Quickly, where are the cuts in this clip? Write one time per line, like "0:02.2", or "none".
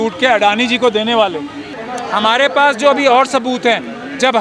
0:01.8